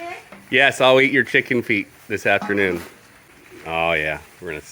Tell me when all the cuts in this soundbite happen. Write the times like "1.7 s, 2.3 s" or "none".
3.2 s